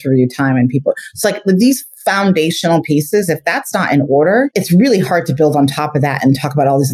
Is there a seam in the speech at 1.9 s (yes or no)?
no